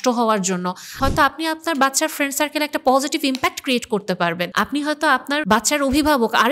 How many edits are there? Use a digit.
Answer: 3